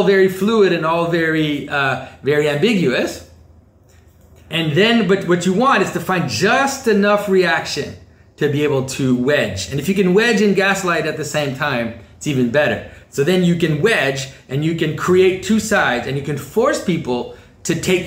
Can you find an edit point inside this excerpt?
yes; 1 cut; at 4.5 s

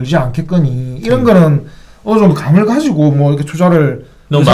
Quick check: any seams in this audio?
no; 0 cuts

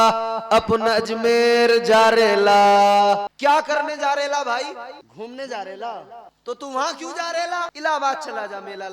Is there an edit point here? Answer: yes; 4 cuts; at 3.3 s, 5.0 s, 6.2 s, 7.7 s

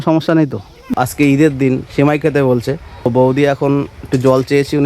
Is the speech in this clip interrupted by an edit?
yes; 2 cuts; at 0.9 s, 3.1 s

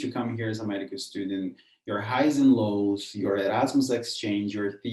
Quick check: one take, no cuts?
yes; 0 cuts

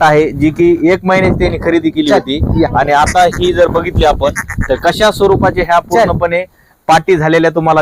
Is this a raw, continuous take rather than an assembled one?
yes; 0 cuts

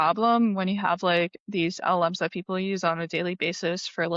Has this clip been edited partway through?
no; 0 cuts

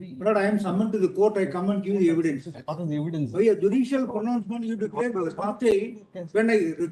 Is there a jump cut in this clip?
no; 0 cuts

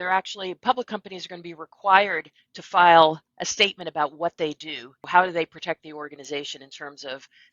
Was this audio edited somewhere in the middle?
yes; 1 cut; at 4.9 s

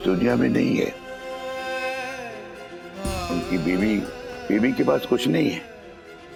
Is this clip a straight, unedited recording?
yes; 0 cuts

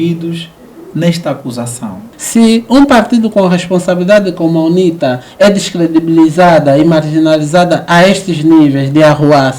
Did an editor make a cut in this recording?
yes; 1 cut; at 2.0 s

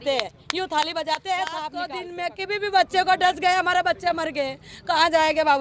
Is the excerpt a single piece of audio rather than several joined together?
no; 1 cut; at 2.0 s

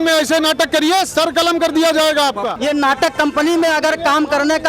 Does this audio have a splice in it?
yes; 1 cut; at 2.5 s

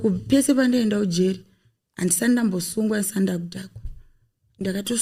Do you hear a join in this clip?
no; 0 cuts

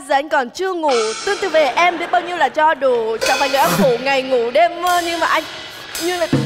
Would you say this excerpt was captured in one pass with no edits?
yes; 0 cuts

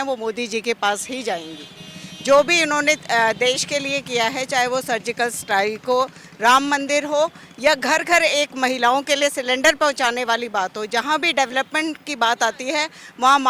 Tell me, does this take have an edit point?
no; 0 cuts

